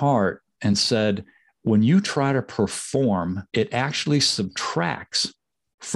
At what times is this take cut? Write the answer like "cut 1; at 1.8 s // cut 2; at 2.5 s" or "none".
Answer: cut 1; at 3.4 s

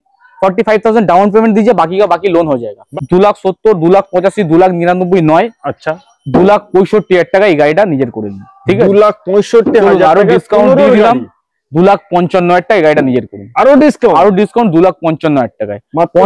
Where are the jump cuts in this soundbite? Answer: cut 1; at 2.8 s

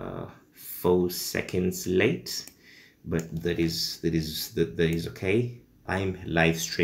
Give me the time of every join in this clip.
cut 1; at 5.8 s

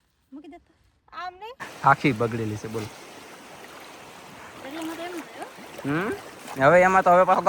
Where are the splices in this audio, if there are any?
cut 1; at 1.7 s

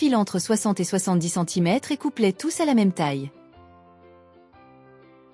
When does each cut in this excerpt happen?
cut 1; at 3.3 s

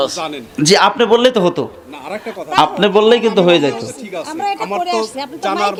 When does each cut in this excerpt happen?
none

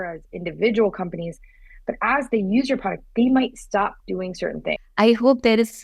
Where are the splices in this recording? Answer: cut 1; at 4.8 s

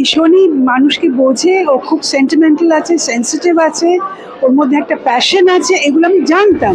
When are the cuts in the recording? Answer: none

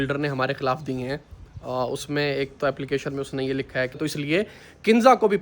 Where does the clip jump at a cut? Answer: cut 1; at 3.9 s

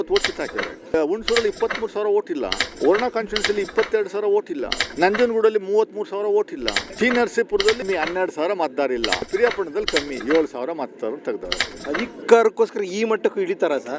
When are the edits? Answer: cut 1; at 0.9 s // cut 2; at 2.6 s // cut 3; at 4.8 s // cut 4; at 6.8 s // cut 5; at 7.8 s // cut 6; at 9.3 s // cut 7; at 11.8 s

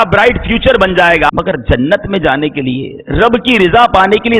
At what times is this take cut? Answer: cut 1; at 1.3 s

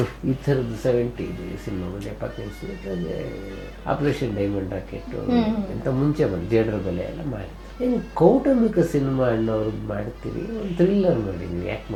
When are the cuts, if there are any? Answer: none

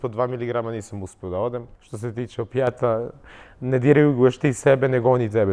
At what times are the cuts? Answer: cut 1; at 1.8 s

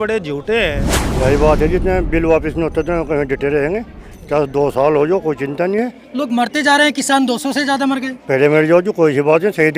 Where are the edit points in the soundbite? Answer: cut 1; at 1.0 s

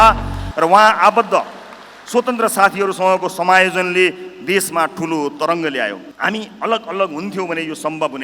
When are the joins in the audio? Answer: cut 1; at 6.1 s

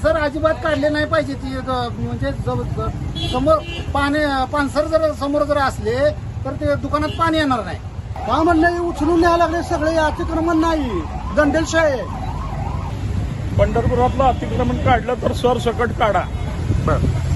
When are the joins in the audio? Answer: cut 1; at 8.1 s // cut 2; at 12.9 s

